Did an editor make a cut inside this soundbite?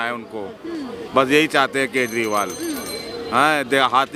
no; 0 cuts

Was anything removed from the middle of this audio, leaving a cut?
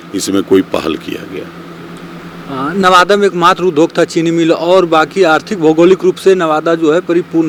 no; 0 cuts

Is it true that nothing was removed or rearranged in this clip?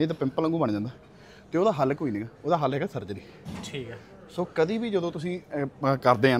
yes; 0 cuts

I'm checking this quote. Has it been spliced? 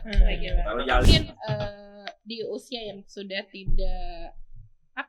yes; 1 cut; at 1.1 s

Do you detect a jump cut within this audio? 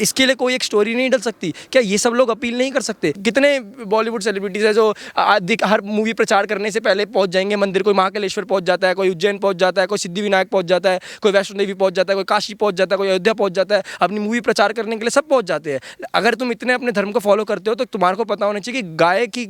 yes; 1 cut; at 3.2 s

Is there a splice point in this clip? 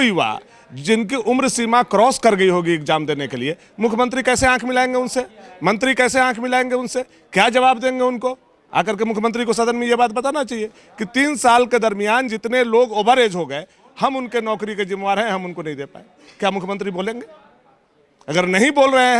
no; 0 cuts

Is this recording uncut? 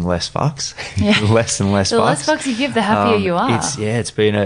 yes; 0 cuts

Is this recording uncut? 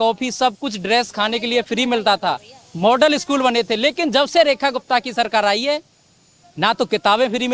yes; 0 cuts

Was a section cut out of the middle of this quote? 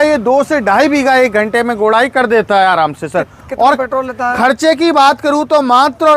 no; 0 cuts

